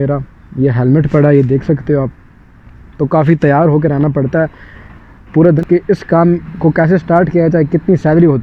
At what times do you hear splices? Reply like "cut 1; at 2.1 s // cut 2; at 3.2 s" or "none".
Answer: cut 1; at 5.6 s